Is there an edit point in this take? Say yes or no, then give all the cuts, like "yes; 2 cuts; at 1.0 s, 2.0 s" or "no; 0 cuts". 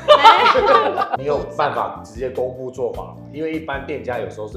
yes; 1 cut; at 1.2 s